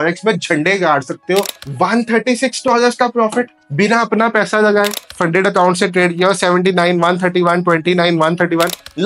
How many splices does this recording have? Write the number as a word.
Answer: two